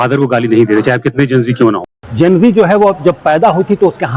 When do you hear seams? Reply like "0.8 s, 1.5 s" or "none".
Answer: 2.0 s